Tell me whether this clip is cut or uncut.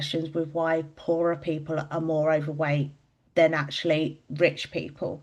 uncut